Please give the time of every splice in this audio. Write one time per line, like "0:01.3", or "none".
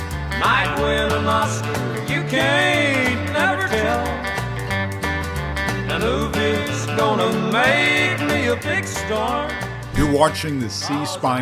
0:10.0